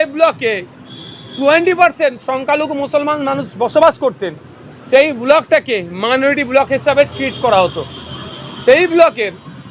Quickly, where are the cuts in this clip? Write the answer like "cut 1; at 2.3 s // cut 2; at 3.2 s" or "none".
none